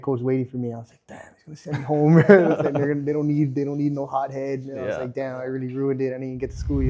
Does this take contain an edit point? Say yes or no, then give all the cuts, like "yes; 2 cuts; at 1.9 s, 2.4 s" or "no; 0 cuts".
no; 0 cuts